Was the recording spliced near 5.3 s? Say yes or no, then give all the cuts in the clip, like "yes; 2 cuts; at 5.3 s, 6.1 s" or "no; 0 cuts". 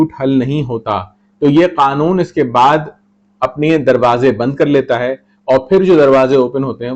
no; 0 cuts